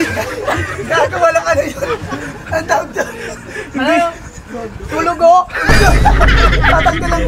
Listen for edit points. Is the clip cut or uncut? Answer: uncut